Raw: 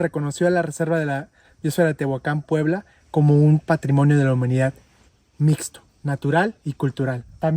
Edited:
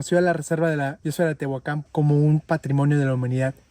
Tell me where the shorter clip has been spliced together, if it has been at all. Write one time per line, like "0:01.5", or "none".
0:01.0
0:01.8